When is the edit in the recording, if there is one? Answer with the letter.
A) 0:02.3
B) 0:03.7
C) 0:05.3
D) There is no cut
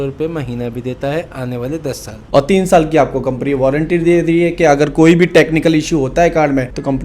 A